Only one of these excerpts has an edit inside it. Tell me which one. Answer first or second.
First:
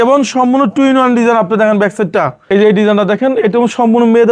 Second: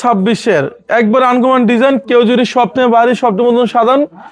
first